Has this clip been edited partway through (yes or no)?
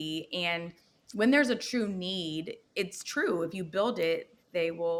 no